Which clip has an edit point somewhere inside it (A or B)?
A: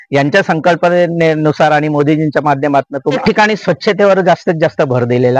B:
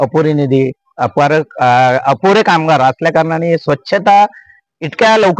A